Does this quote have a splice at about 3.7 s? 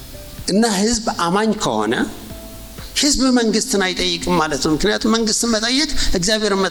no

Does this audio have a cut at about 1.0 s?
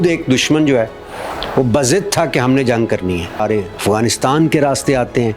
no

